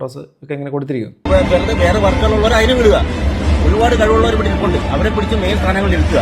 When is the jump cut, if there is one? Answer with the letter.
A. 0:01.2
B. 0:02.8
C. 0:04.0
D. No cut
A